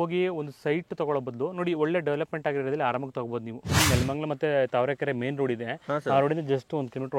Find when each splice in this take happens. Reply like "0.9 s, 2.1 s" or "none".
3.8 s